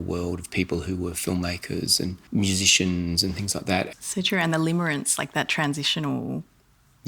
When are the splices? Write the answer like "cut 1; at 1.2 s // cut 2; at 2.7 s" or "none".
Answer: cut 1; at 2.2 s // cut 2; at 3.9 s